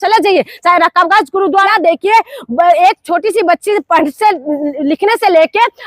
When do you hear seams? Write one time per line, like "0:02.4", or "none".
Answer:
0:01.7